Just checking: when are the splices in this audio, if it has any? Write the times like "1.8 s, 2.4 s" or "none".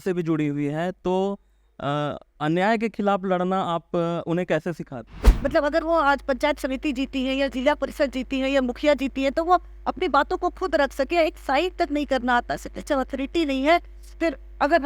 5.2 s